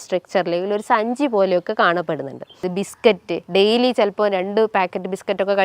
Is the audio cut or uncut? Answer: cut